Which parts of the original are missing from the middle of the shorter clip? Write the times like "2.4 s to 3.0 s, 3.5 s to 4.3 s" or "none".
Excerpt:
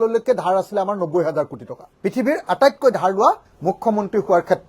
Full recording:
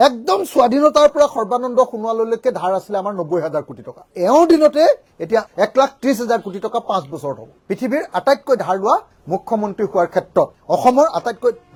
4.0 s to 7.5 s